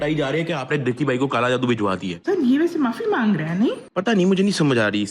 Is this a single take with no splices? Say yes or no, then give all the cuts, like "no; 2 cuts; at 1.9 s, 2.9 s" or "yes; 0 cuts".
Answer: no; 1 cut; at 2.1 s